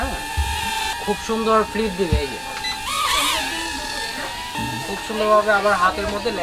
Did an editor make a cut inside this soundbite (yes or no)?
yes